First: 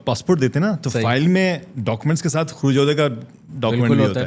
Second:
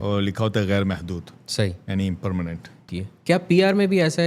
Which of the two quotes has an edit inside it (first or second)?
second